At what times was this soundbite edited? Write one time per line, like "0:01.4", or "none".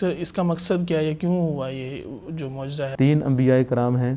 0:02.9